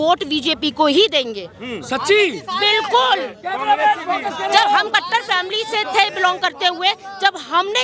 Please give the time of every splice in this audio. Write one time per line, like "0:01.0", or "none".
none

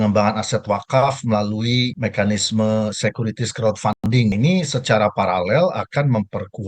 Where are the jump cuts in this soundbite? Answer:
0:04.3

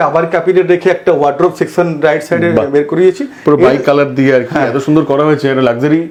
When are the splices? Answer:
none

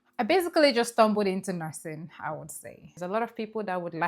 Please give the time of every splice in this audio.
0:03.0

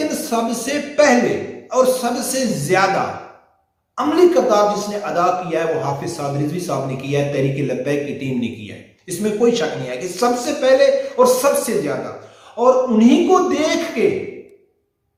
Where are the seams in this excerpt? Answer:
none

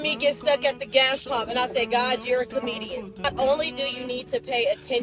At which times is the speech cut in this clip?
0:03.3

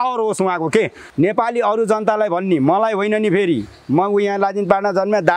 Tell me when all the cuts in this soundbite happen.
0:01.0

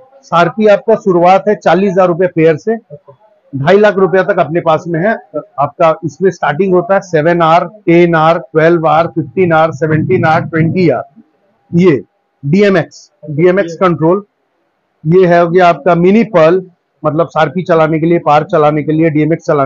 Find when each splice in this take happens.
0:11.4

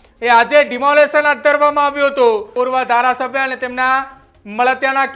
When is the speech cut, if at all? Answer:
0:02.5

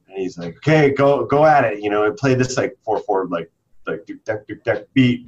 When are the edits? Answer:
none

